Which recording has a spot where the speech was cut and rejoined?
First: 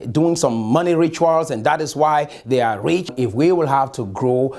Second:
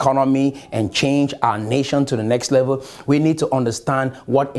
first; 1 cut; at 3.1 s

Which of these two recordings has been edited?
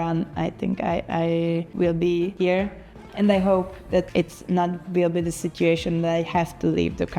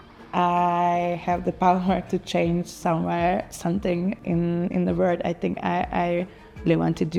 first; 3 cuts; at 1.7 s, 2.7 s, 4.1 s

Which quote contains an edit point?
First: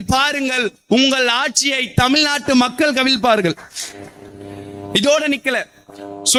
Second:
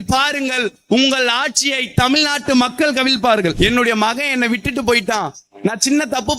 second; 1 cut; at 3.5 s

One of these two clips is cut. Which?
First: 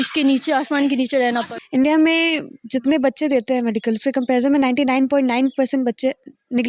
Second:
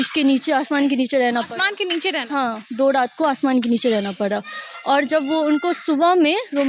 first; 1 cut; at 1.6 s

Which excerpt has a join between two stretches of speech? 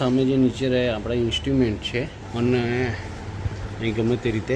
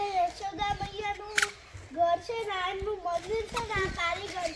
first; 1 cut; at 2.2 s

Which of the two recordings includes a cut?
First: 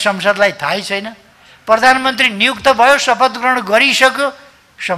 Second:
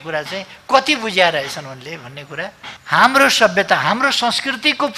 second; 1 cut; at 2.7 s

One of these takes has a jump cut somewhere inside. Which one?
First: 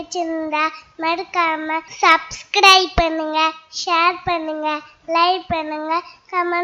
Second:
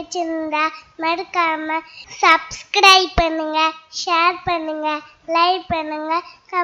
first; 1 cut; at 1.9 s

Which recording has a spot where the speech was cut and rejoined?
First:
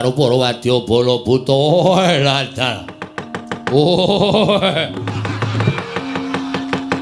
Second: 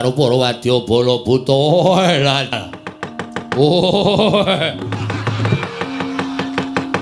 second; 1 cut; at 2.5 s

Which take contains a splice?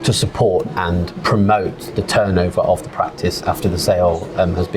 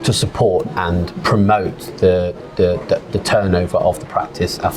first; 1 cut; at 1.9 s

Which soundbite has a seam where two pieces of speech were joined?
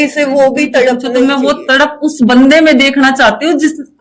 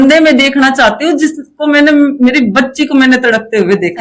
first; 1 cut; at 1.1 s

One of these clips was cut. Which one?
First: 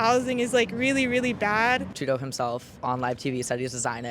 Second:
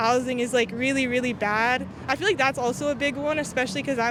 first; 1 cut; at 1.9 s

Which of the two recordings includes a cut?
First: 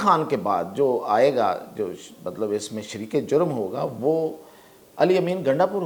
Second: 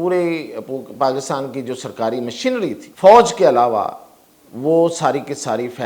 second; 1 cut; at 2.9 s

